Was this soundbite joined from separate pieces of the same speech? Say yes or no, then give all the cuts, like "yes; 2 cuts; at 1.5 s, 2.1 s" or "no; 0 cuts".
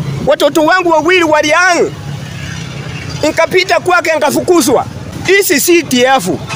yes; 1 cut; at 5.1 s